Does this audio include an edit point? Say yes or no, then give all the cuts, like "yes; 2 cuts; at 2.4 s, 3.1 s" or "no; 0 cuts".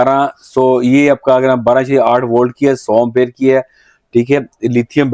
no; 0 cuts